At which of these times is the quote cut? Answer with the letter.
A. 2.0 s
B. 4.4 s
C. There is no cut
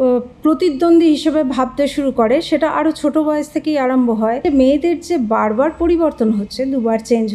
B